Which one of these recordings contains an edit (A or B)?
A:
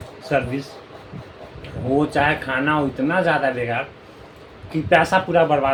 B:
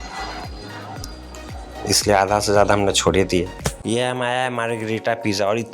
B